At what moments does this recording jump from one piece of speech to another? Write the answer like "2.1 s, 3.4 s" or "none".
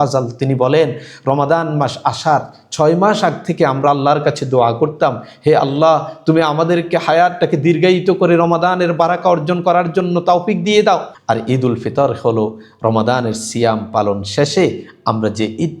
11.1 s